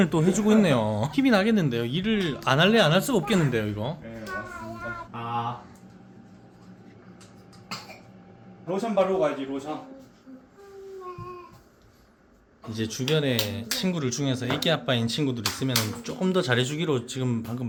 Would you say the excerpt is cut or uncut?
uncut